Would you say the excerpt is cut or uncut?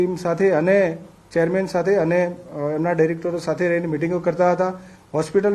uncut